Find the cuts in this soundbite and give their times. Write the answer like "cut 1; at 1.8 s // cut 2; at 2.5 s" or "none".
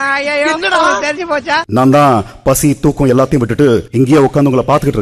cut 1; at 1.6 s